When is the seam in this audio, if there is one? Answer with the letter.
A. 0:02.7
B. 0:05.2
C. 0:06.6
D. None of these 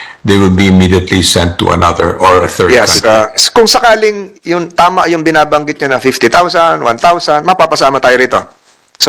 A